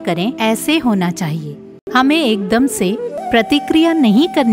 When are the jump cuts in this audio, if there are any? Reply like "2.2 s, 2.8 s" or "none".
1.8 s, 3.2 s